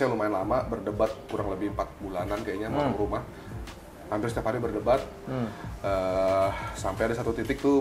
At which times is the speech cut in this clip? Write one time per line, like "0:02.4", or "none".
none